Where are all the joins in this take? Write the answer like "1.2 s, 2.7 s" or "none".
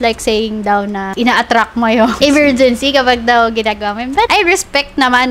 1.1 s, 2.1 s, 4.3 s